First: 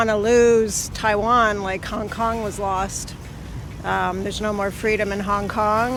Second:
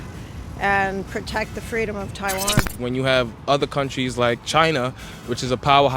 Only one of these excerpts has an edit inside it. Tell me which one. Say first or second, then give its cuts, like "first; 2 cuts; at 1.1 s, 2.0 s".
second; 1 cut; at 2.7 s